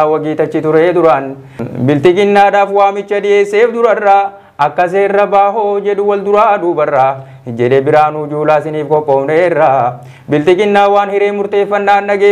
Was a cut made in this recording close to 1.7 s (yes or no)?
yes